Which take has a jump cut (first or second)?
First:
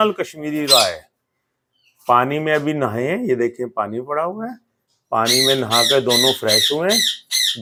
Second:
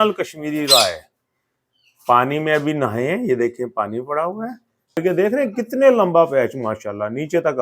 second